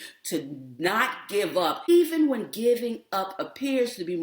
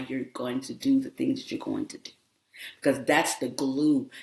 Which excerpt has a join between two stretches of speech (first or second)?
first